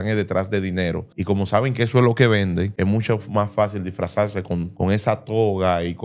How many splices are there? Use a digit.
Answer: 3